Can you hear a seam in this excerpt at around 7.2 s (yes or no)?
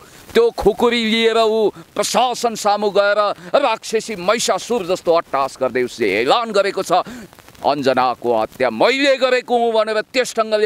yes